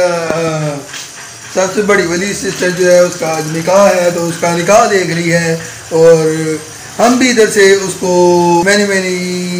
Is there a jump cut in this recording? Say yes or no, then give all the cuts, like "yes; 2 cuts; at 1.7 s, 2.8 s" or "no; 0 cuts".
yes; 1 cut; at 8.6 s